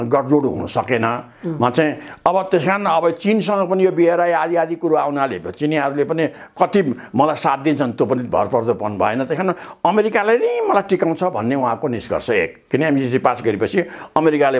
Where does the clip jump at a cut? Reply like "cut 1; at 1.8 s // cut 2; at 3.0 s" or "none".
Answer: none

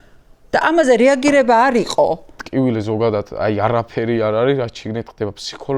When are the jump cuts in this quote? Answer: cut 1; at 2.4 s

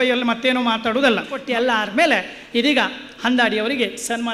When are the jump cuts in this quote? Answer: cut 1; at 1.4 s

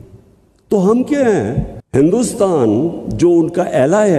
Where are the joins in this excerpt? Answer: cut 1; at 1.5 s

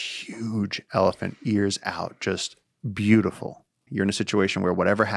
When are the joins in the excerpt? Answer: cut 1; at 3.8 s

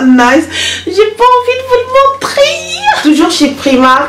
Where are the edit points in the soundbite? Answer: cut 1; at 3.0 s

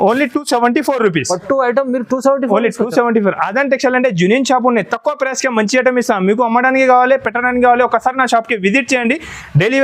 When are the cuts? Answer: none

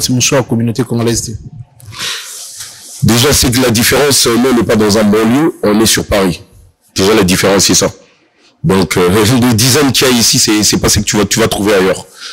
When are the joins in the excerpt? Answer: none

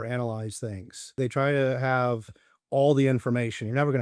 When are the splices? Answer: cut 1; at 1.2 s

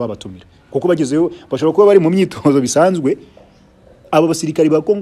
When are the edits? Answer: none

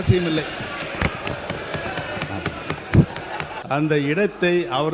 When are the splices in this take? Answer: cut 1; at 3.6 s

